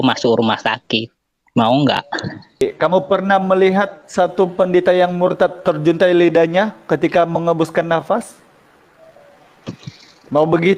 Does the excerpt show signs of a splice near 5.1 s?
no; 1 cut; at 2.6 s

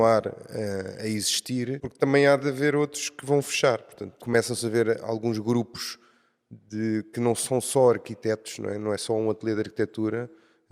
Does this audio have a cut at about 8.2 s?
no; 2 cuts; at 1.8 s, 4.2 s

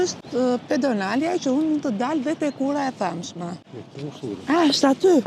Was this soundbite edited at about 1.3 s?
no; 1 cut; at 3.8 s

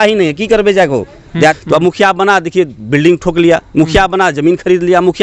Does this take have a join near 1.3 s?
yes; 1 cut; at 1.3 s

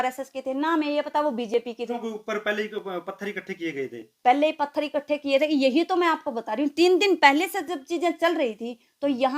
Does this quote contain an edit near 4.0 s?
no; 1 cut; at 2.0 s

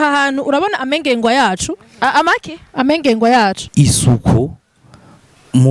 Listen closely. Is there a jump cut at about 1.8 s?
no; 1 cut; at 3.6 s

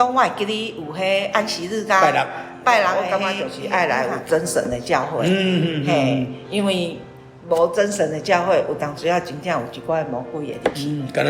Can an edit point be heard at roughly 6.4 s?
no; 1 cut; at 3.2 s

